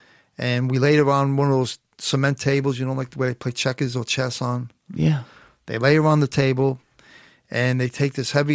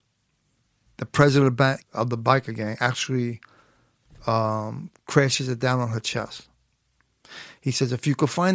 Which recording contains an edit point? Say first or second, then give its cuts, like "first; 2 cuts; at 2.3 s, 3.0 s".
second; 1 cut; at 1.8 s